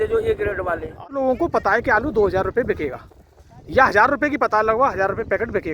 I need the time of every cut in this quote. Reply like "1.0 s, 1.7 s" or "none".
1.0 s